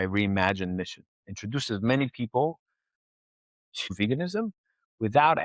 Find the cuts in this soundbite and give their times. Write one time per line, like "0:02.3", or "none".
0:03.8